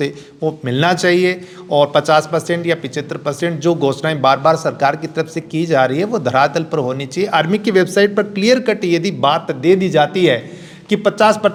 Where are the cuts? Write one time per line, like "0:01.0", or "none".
none